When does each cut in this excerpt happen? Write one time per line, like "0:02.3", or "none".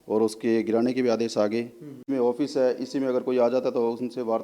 0:02.0